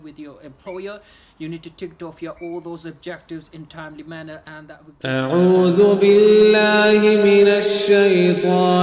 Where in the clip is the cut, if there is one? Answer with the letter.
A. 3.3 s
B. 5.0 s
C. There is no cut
B